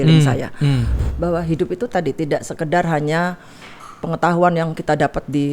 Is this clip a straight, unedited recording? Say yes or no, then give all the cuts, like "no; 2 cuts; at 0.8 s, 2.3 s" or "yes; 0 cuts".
no; 1 cut; at 0.9 s